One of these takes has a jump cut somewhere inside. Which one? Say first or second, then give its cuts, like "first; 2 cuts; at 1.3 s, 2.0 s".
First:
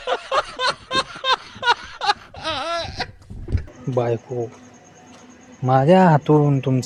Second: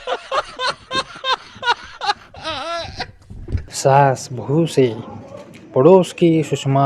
second; 1 cut; at 3.7 s